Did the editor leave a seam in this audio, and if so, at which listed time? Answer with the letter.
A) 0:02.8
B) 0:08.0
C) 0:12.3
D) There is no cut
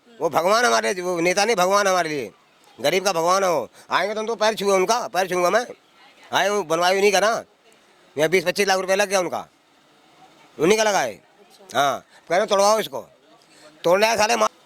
D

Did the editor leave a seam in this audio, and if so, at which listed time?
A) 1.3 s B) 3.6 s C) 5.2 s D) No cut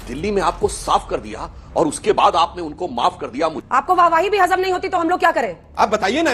B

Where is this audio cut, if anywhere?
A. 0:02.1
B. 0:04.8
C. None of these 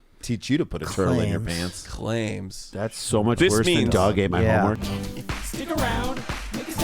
B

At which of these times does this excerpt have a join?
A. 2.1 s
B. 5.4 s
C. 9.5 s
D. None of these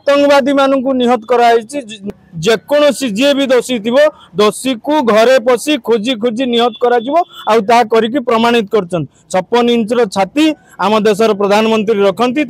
A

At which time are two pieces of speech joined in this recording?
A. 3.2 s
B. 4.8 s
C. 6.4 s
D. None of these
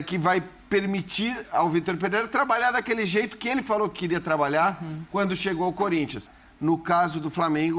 C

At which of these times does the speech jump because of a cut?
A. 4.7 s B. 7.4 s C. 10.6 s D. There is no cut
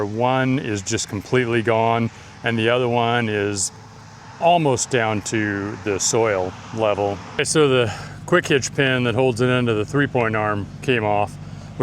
B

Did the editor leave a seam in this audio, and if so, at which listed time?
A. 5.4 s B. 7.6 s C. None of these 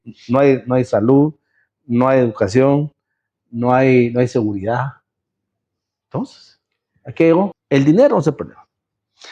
B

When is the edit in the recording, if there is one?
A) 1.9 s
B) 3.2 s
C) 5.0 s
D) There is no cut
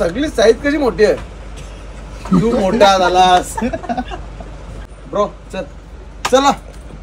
C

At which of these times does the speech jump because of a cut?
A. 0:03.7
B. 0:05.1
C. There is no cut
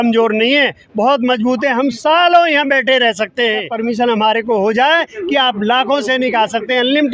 A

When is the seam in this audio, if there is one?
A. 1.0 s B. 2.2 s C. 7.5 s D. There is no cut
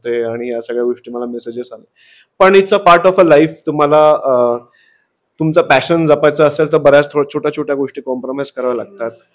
D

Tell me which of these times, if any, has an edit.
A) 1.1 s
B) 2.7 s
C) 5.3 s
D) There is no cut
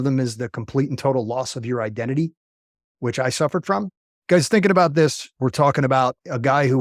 C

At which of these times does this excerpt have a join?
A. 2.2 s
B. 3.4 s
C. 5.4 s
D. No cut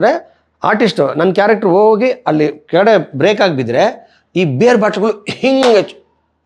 D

